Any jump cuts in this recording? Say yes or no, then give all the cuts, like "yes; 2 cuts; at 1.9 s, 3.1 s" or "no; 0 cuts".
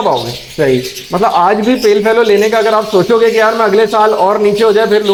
no; 0 cuts